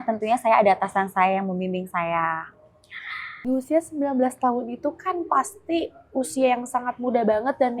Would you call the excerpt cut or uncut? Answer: uncut